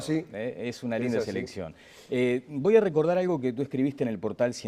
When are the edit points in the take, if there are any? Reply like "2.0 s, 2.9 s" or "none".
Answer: 3.2 s